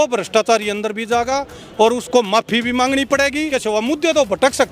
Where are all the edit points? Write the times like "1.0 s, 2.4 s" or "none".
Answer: 3.5 s